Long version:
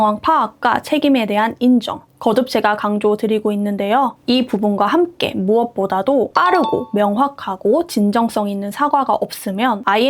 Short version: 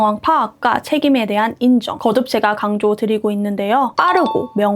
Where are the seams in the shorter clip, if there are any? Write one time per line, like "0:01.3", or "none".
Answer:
0:01.9
0:04.0

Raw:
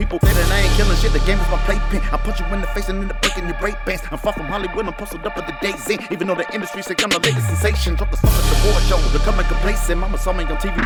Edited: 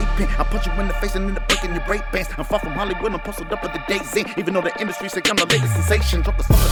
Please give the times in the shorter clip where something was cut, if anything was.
none

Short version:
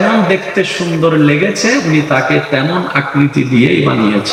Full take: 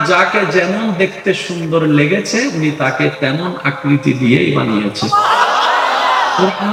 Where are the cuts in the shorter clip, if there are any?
none

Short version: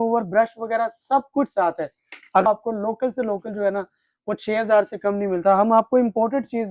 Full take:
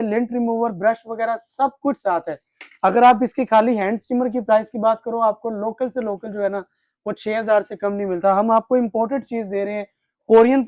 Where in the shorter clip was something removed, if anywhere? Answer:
0:02.4

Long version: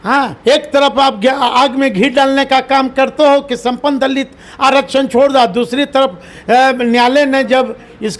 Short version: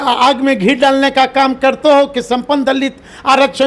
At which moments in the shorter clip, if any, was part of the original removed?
none

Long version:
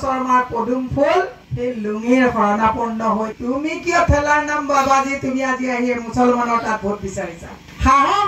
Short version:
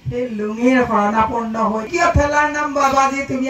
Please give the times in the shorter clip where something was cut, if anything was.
0:01.9

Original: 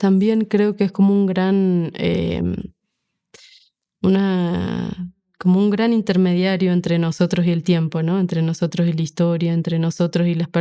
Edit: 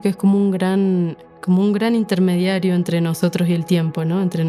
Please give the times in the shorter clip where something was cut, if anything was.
0:01.2

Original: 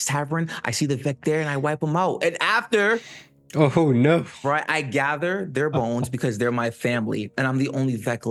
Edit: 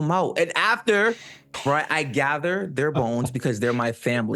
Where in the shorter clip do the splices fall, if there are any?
0:01.5

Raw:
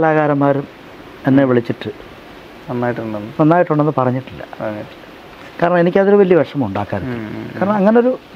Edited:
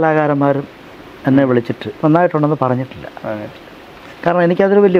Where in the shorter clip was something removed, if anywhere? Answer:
0:01.9

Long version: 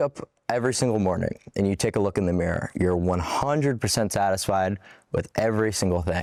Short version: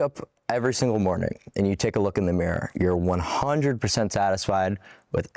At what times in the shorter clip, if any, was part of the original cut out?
none

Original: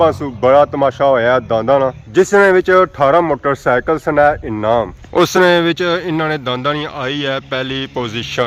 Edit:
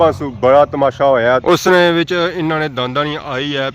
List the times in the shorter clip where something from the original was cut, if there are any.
0:01.4

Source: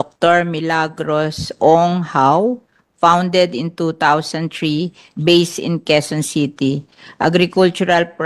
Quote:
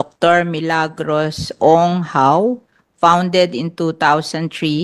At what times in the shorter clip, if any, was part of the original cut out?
none

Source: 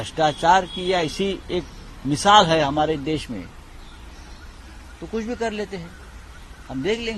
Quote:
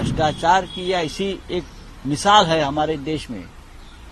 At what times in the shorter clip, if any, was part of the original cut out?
none

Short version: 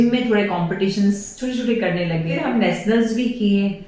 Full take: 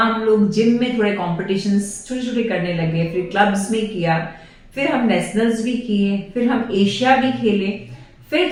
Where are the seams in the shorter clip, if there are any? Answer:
0:02.3

